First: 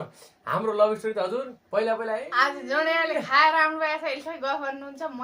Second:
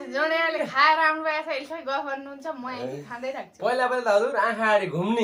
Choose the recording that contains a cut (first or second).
first